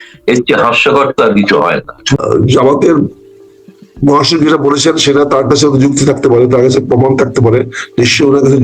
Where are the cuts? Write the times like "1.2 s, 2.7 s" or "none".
2.0 s